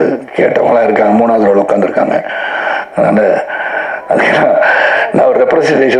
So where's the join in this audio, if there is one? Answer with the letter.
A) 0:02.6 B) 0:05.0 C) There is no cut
C